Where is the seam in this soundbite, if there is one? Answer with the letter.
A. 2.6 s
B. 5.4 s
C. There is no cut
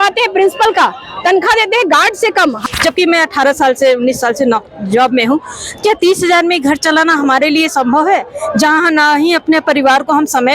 A